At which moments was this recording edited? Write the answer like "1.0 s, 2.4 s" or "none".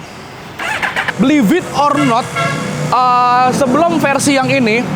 1.0 s